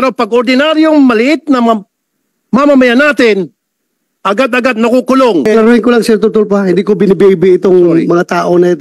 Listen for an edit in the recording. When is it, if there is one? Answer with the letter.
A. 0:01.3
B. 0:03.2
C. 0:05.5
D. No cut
C